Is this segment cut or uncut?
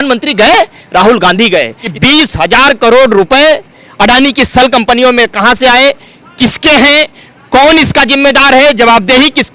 cut